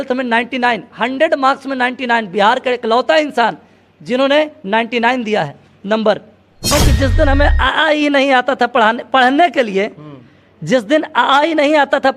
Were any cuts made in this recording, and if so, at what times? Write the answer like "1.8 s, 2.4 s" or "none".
6.9 s